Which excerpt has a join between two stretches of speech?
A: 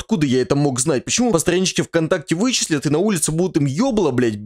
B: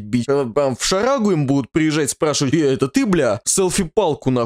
A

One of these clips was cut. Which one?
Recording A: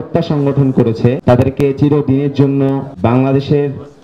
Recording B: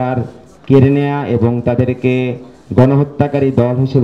A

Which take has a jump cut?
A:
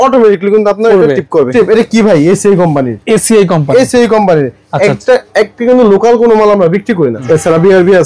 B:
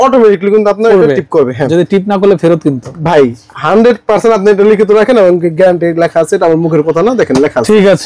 A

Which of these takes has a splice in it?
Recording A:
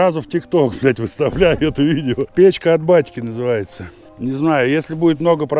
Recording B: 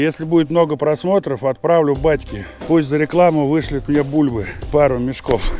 A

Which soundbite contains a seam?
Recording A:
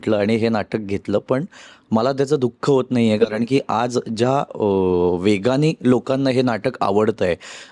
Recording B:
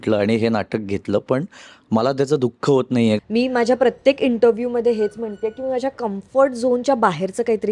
B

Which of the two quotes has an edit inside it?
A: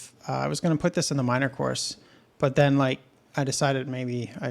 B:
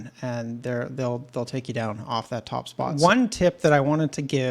B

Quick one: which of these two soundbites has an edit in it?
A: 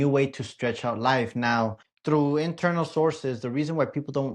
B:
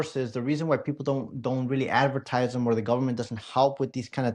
A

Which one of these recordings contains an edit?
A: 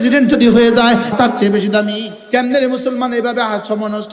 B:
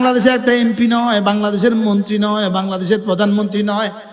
A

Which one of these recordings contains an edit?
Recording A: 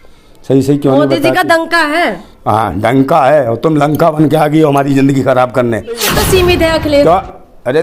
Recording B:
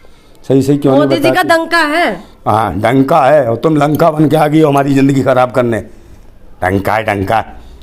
A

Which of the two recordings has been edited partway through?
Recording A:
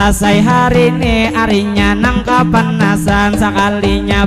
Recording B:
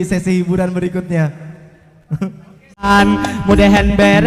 B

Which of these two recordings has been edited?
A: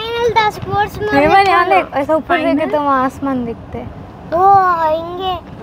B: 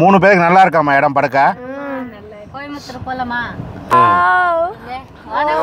B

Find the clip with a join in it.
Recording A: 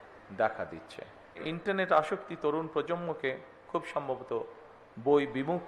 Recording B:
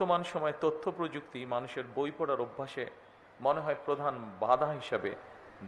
A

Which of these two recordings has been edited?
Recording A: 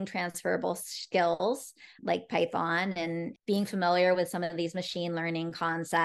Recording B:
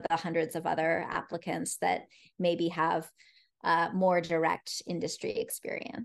A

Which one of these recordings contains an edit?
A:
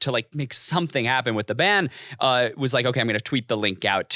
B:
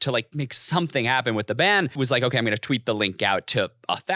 B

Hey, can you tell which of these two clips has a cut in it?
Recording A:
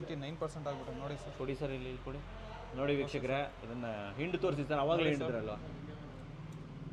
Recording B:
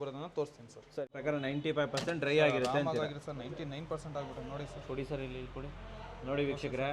B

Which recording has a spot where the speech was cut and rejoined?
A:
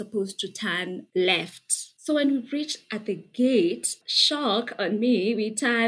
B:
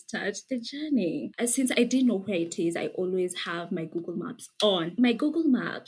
B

